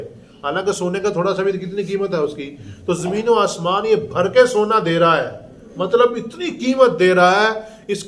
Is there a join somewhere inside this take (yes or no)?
no